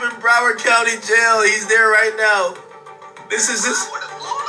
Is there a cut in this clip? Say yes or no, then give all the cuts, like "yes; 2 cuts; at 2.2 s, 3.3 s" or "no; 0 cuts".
no; 0 cuts